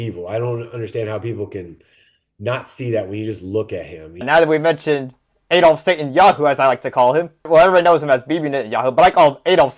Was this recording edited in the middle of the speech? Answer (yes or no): yes